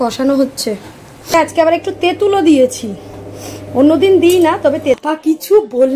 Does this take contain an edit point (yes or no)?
yes